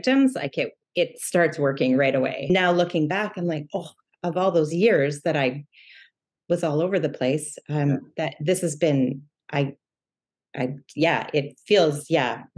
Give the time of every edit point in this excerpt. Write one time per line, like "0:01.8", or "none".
0:02.4